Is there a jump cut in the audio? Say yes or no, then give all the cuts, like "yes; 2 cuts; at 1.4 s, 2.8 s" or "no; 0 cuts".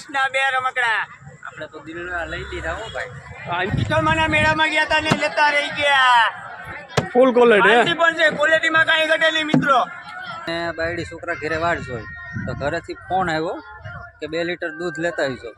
yes; 2 cuts; at 3.7 s, 10.4 s